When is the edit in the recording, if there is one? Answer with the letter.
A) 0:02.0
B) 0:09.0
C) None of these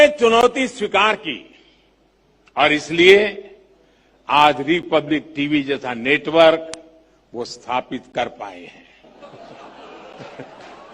B